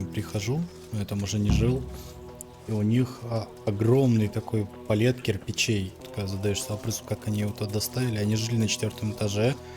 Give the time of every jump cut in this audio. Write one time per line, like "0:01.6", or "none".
0:06.0